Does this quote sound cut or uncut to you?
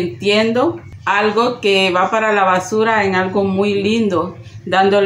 cut